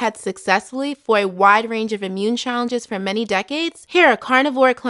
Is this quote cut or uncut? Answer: uncut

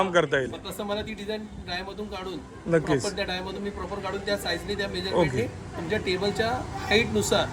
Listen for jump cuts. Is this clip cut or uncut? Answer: uncut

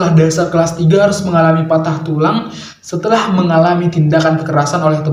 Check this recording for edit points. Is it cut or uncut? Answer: uncut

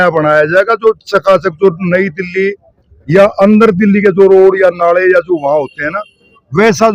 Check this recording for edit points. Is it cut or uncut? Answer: uncut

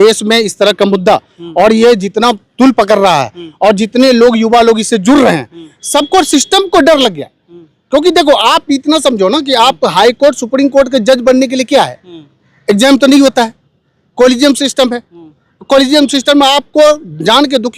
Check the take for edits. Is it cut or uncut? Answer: uncut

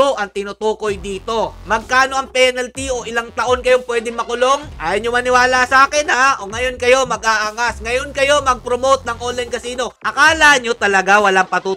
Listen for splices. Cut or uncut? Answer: cut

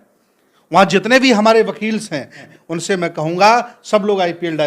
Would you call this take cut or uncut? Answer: cut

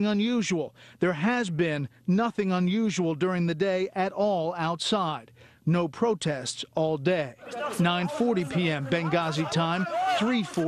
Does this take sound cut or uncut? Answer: cut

